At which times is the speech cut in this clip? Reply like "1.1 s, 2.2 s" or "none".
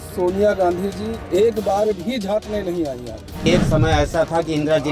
1.1 s, 3.4 s

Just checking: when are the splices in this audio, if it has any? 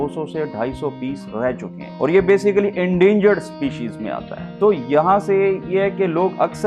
none

